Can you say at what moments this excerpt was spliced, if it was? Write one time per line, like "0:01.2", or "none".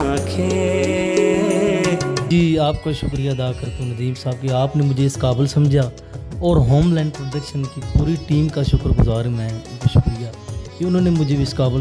0:02.2